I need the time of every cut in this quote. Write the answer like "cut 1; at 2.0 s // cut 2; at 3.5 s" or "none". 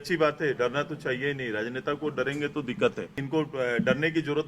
cut 1; at 3.2 s